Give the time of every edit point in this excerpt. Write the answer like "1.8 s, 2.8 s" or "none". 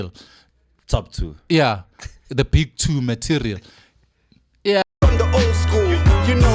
4.8 s